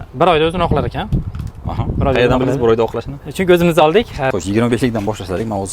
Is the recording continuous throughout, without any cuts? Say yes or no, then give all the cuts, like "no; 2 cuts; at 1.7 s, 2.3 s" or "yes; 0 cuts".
no; 1 cut; at 4.3 s